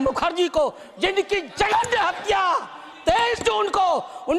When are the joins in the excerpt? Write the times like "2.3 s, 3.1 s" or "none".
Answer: none